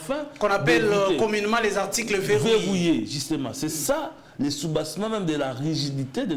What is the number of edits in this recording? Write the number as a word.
zero